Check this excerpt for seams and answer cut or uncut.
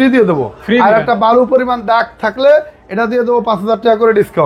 uncut